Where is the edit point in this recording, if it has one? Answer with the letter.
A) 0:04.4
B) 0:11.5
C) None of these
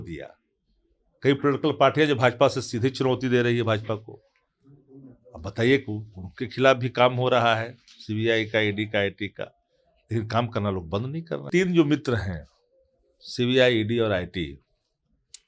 B